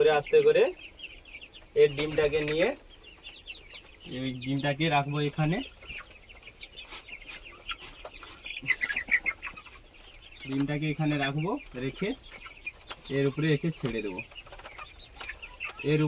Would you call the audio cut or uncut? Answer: uncut